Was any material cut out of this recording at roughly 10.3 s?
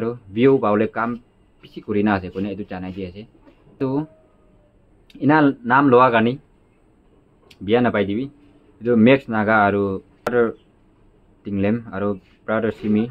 yes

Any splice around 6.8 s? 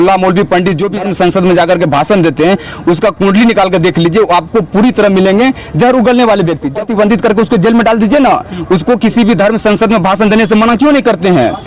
yes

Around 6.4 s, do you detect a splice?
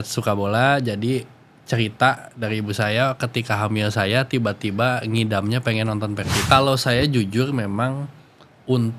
yes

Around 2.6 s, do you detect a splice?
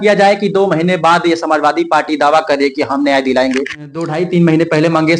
no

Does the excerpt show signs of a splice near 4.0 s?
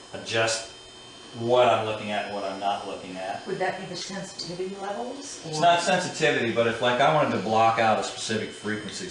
yes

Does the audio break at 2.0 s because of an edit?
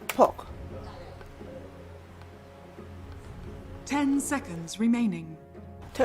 yes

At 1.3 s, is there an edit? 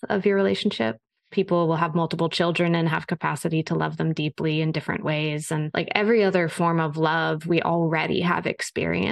yes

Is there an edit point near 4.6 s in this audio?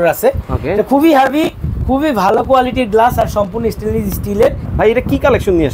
yes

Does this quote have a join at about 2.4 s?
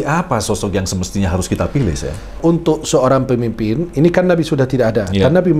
yes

